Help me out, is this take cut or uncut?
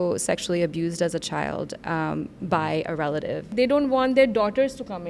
cut